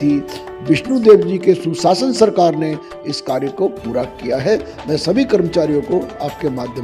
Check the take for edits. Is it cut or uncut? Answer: uncut